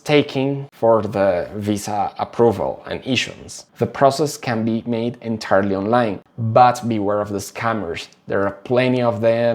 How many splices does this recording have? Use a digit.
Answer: 1